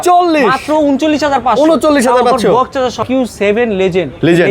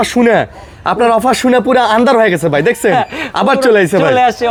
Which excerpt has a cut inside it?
first; 1 cut; at 3.0 s

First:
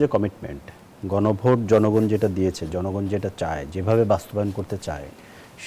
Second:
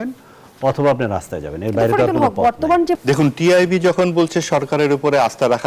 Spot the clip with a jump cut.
second; 1 cut; at 2.9 s

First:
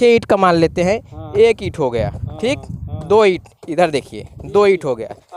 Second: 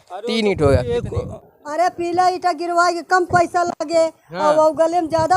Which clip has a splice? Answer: second; 1 cut; at 1.4 s

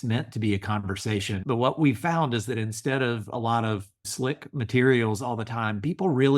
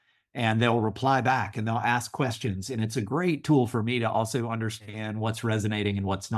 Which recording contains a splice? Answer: first; 2 cuts; at 1.4 s, 4.1 s

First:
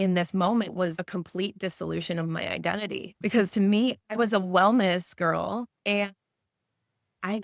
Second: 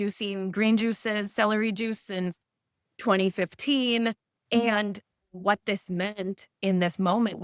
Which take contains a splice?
first; 1 cut; at 3.1 s

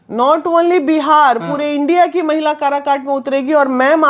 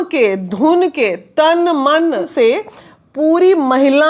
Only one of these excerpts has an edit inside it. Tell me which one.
second; 1 cut; at 2.3 s

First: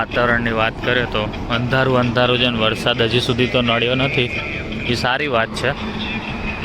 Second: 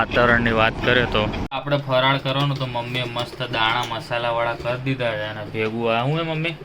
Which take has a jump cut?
second; 1 cut; at 1.4 s

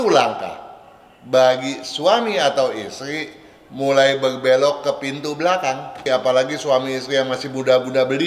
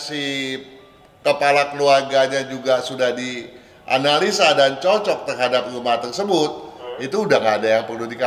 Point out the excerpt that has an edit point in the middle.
first; 1 cut; at 6.0 s

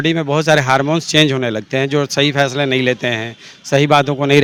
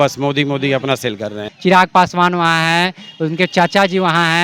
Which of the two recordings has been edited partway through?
second; 1 cut; at 1.5 s

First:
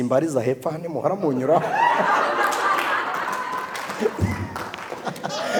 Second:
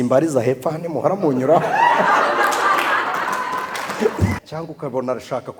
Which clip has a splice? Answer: second; 1 cut; at 4.4 s

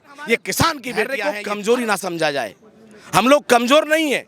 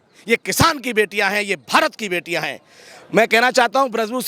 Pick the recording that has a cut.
first; 1 cut; at 1.1 s

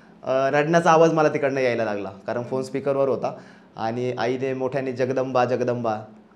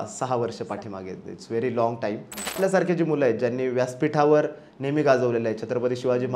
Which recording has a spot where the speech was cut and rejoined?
second; 1 cut; at 2.6 s

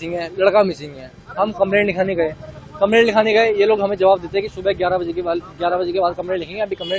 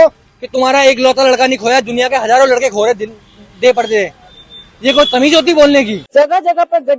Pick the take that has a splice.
second; 1 cut; at 6.0 s

